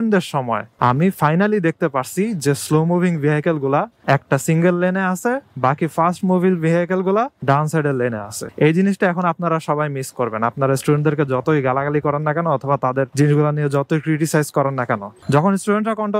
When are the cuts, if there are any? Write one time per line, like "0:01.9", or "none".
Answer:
0:15.1